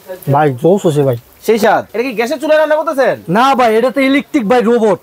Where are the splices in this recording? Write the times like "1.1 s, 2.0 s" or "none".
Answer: 1.9 s